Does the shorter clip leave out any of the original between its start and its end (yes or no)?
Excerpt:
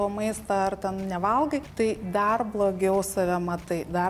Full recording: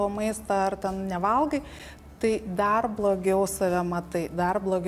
yes